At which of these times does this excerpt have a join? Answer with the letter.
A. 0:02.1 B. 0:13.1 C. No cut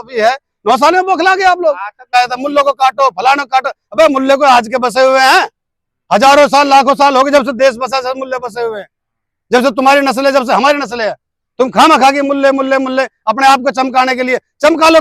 A